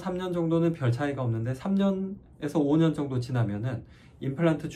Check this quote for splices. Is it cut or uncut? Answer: uncut